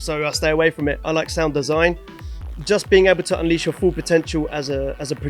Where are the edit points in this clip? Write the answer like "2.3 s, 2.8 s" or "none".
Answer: 2.5 s